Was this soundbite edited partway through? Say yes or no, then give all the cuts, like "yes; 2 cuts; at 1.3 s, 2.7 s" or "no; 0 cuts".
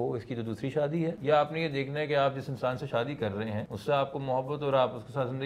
yes; 2 cuts; at 1.2 s, 3.7 s